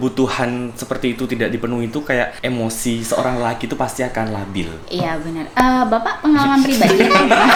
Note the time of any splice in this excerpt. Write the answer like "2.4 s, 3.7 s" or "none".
none